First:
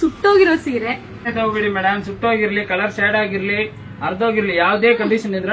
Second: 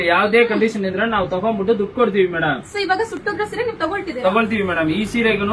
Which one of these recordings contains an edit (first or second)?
first